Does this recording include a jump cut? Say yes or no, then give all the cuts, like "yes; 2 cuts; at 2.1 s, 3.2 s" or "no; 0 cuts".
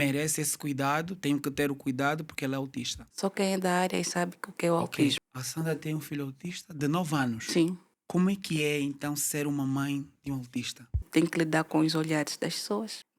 yes; 3 cuts; at 3.0 s, 5.2 s, 11.0 s